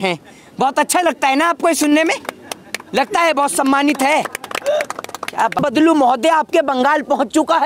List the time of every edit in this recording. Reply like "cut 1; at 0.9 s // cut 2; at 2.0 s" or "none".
cut 1; at 5.6 s